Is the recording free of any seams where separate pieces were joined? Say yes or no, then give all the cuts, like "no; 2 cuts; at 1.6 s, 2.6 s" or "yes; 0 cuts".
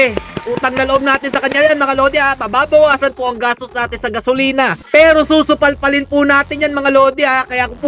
no; 1 cut; at 4.8 s